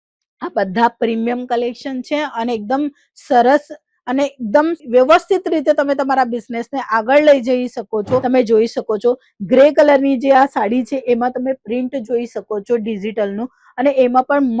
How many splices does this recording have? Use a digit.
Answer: 1